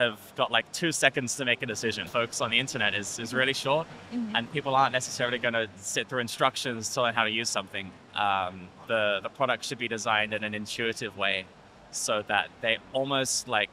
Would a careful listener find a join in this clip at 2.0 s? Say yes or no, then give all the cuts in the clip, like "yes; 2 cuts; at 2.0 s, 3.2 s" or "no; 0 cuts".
yes; 1 cut; at 2.0 s